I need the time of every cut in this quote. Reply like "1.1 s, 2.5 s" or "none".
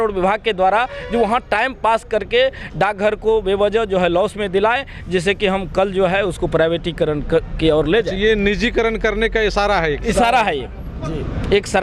none

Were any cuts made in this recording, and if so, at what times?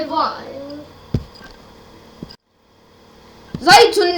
none

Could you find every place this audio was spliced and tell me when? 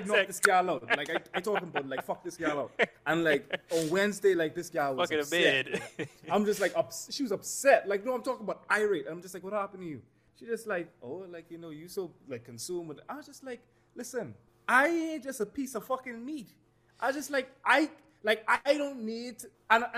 10.2 s, 14.5 s

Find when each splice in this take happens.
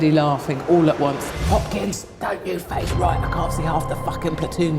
1.3 s

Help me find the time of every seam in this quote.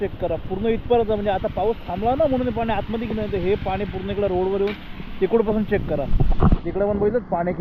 none

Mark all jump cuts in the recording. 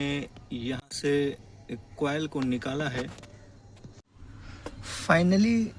3.9 s

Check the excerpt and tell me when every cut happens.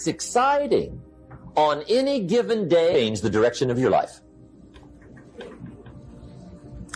2.9 s

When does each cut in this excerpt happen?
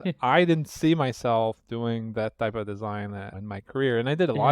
3.3 s

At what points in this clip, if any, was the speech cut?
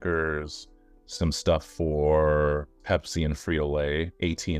2.8 s

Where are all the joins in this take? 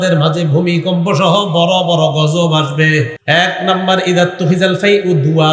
3.1 s

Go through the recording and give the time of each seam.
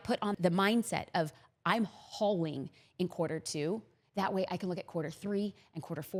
none

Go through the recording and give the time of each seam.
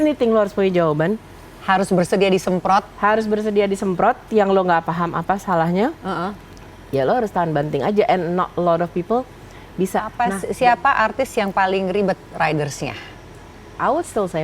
10.3 s

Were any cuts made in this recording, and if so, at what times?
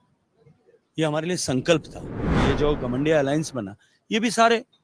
2.3 s

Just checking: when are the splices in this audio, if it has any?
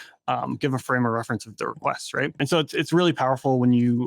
2.4 s

